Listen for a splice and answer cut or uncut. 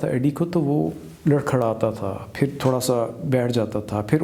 uncut